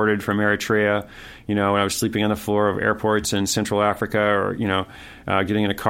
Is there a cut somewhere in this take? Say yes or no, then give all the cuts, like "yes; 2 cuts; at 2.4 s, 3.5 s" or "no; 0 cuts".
no; 0 cuts